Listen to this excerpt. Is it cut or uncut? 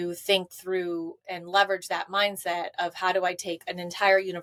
uncut